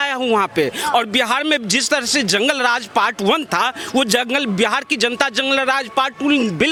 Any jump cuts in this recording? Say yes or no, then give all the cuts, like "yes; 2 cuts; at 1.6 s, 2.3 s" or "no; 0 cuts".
no; 0 cuts